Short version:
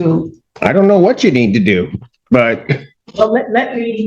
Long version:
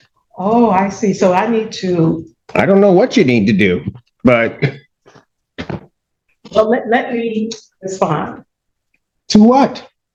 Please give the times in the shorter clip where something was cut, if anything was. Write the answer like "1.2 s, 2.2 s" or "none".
3.0 s